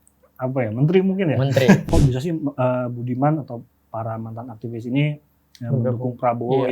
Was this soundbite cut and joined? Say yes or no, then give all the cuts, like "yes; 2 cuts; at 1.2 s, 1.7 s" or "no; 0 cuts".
yes; 1 cut; at 1.9 s